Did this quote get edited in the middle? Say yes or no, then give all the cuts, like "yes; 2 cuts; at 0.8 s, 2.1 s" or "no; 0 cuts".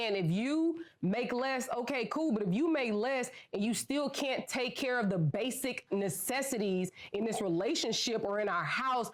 no; 0 cuts